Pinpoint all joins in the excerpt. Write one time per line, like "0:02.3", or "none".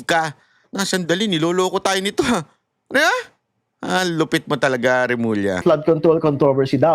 0:05.6